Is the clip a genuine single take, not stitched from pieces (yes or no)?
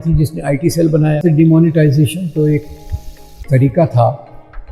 no